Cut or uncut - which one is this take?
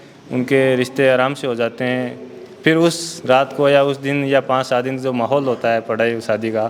uncut